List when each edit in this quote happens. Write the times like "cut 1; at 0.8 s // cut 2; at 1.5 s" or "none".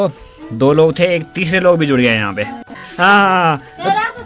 cut 1; at 2.8 s